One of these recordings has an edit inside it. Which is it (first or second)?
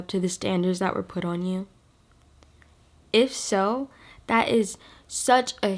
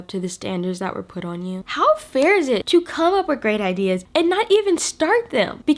second